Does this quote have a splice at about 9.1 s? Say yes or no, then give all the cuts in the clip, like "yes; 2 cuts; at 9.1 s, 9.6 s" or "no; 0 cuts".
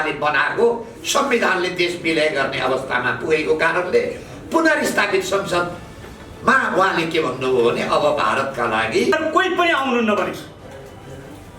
yes; 1 cut; at 9.1 s